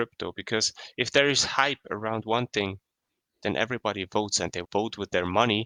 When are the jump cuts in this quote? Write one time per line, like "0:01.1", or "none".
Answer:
none